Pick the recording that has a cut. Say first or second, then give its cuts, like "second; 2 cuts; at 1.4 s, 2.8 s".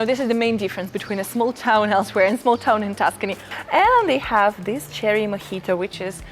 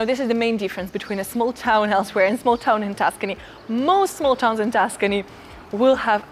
first; 1 cut; at 3.5 s